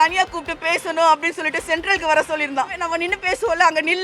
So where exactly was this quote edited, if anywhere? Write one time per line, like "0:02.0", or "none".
0:02.8